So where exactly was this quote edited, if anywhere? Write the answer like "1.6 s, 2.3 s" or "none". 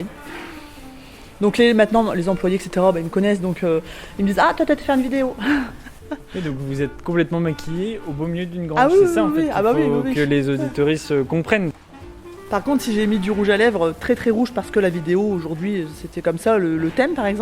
11.7 s